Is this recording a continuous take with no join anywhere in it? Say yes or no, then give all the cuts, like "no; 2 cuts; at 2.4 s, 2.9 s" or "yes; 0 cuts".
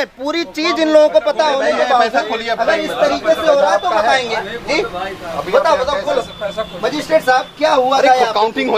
yes; 0 cuts